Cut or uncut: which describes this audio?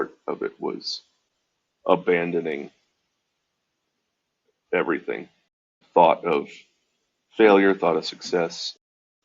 cut